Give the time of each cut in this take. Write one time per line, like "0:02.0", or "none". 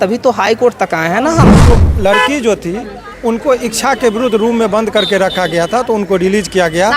0:01.6